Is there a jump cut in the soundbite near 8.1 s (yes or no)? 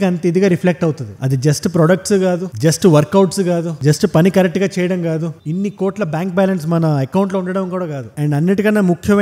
yes